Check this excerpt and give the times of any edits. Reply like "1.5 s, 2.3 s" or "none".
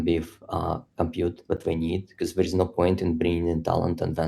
none